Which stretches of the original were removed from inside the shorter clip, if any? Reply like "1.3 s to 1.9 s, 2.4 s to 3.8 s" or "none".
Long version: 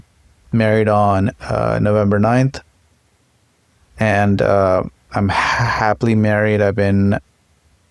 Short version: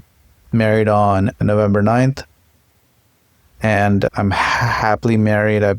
1.4 s to 1.8 s, 4.4 s to 5.1 s